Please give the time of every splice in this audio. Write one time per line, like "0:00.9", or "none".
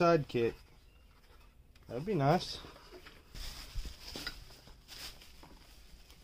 0:03.4